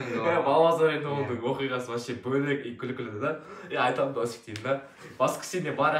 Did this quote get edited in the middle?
no; 0 cuts

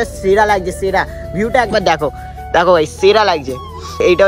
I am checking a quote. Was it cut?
no; 0 cuts

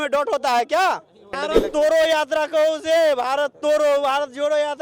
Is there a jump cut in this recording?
yes; 1 cut; at 1.4 s

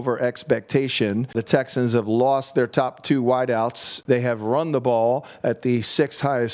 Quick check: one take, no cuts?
no; 2 cuts; at 1.3 s, 3.9 s

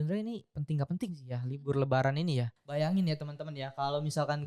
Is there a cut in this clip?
yes; 1 cut; at 2.6 s

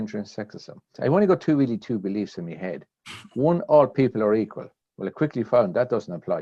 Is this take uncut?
no; 1 cut; at 1.0 s

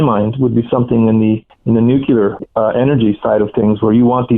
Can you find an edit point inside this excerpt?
yes; 2 cuts; at 1.5 s, 2.4 s

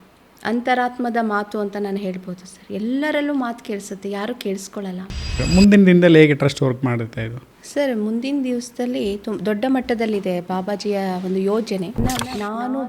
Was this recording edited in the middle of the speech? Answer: yes; 2 cuts; at 5.4 s, 12.0 s

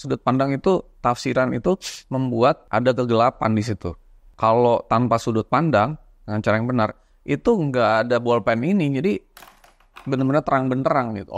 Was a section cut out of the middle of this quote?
yes; 1 cut; at 2.6 s

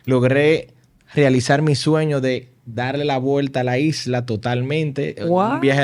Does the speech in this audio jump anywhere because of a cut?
no; 0 cuts

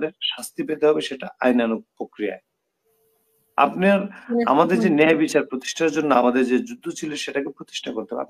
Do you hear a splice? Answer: no; 0 cuts

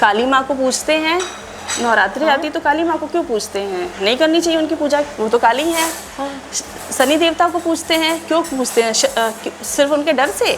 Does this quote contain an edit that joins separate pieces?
no; 0 cuts

